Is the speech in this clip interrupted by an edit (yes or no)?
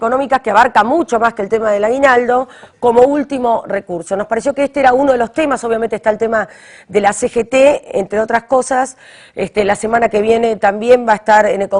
no